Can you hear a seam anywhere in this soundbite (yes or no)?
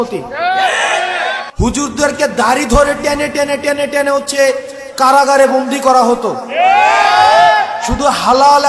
yes